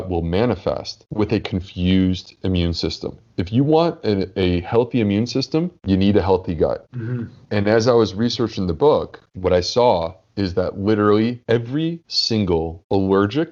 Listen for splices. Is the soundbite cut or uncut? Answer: uncut